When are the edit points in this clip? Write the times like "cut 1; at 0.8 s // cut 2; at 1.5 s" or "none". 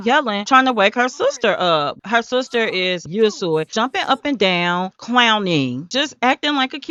none